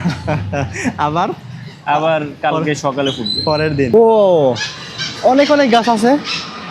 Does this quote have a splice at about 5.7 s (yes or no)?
no